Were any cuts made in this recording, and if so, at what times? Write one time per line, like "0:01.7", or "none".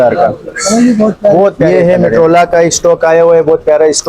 0:01.7